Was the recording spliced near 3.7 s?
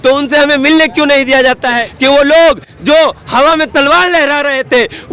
no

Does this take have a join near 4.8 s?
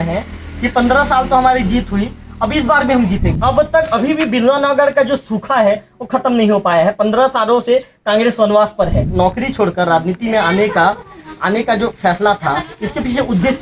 no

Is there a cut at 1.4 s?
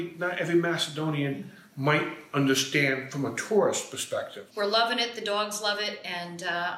no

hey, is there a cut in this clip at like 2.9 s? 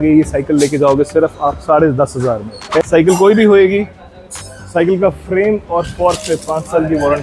yes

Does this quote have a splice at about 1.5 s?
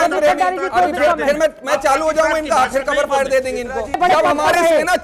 no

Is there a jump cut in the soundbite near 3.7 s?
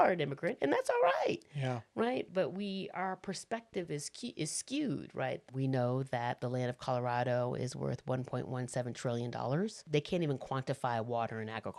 no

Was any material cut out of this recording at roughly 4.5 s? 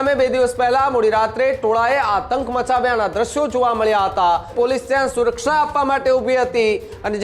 yes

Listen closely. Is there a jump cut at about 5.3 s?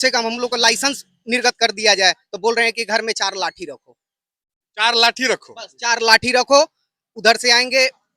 no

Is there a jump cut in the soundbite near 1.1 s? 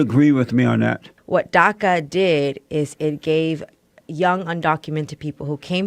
yes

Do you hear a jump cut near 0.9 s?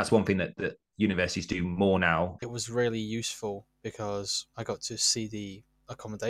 no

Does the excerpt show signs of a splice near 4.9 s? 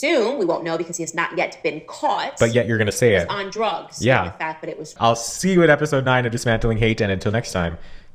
yes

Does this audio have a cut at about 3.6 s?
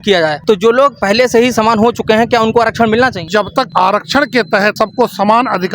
yes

